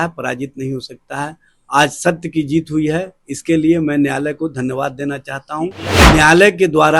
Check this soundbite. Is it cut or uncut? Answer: cut